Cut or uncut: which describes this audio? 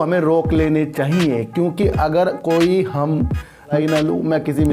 cut